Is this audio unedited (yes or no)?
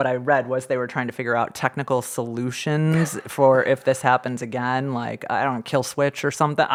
yes